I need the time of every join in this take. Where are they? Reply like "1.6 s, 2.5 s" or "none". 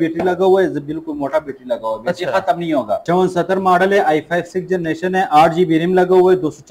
3.0 s